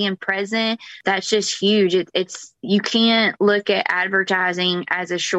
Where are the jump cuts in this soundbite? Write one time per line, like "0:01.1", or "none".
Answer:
0:01.0

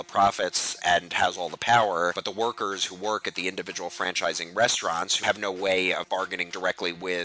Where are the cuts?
0:00.8
0:02.2
0:05.2
0:06.1

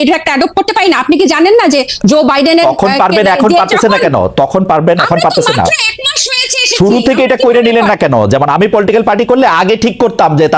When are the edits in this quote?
none

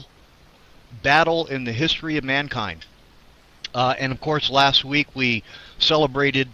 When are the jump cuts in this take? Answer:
0:02.7

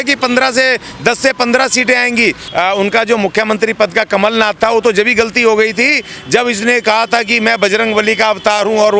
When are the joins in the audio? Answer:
0:02.4

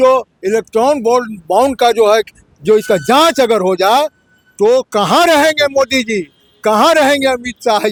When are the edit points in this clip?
none

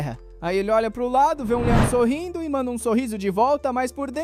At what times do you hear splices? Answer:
none

